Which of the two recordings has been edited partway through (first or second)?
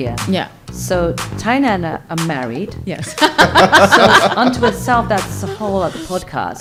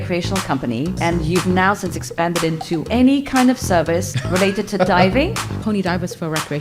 second